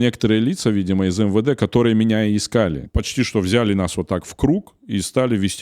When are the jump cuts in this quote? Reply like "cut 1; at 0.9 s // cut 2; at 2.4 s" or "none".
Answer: cut 1; at 2.9 s